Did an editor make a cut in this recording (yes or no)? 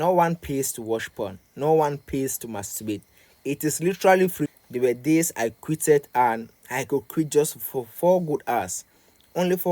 yes